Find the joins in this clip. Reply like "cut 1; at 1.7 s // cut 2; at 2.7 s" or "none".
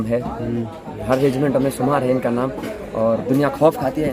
none

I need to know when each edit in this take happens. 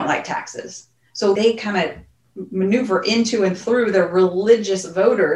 cut 1; at 1.4 s

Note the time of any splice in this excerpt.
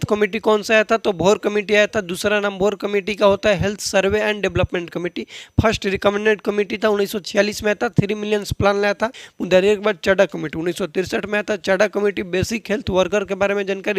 cut 1; at 9.3 s

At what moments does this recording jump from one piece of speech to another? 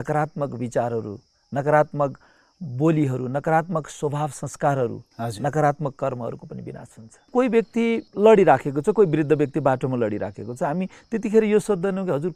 cut 1; at 7.3 s

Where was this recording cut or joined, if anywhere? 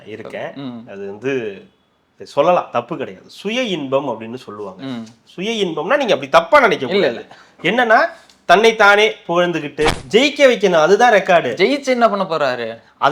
cut 1; at 10.0 s

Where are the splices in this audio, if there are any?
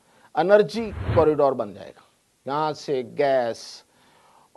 cut 1; at 1.0 s

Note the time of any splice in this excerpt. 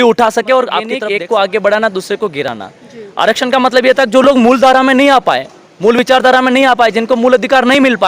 cut 1; at 0.9 s

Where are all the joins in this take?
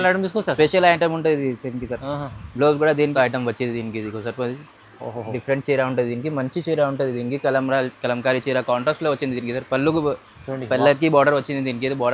cut 1; at 3.1 s

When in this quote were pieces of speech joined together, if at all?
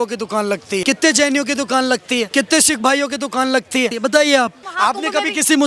cut 1; at 0.8 s // cut 2; at 2.3 s // cut 3; at 3.9 s // cut 4; at 4.6 s

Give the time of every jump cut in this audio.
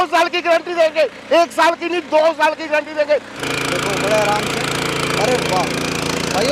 cut 1; at 3.3 s

